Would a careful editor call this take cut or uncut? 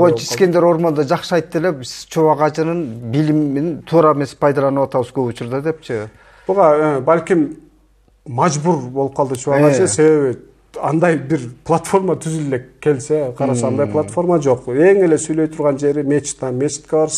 uncut